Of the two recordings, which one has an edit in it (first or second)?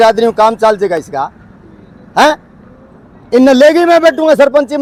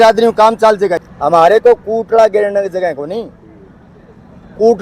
second